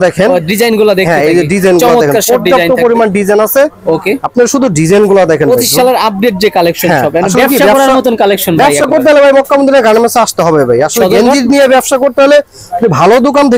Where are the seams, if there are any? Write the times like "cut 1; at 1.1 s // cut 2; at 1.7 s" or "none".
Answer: none